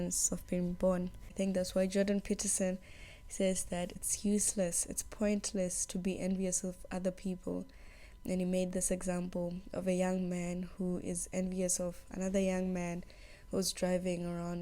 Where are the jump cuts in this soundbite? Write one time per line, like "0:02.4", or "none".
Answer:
0:01.2
0:04.0